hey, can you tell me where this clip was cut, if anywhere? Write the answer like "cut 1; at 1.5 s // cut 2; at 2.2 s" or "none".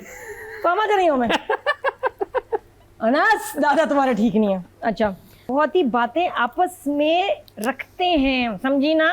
cut 1; at 5.3 s